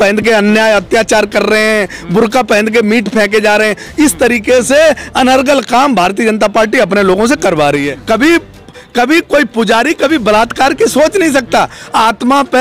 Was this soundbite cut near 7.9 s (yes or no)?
yes